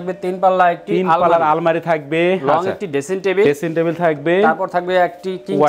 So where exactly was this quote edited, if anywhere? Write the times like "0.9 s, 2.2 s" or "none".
none